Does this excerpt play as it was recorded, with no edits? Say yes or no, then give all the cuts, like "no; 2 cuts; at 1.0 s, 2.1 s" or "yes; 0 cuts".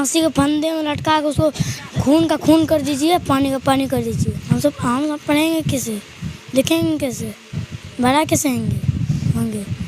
yes; 0 cuts